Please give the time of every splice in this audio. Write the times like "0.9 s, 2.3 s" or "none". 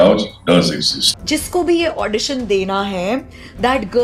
1.0 s